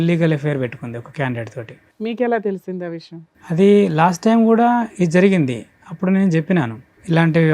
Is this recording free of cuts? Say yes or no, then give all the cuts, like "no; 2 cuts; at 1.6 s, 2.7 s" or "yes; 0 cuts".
yes; 0 cuts